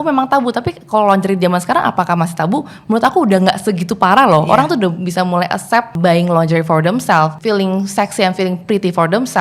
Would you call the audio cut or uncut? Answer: cut